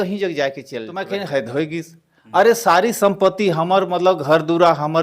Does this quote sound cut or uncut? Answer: cut